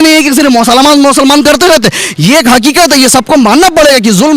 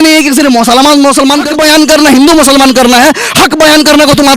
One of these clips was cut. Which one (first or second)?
second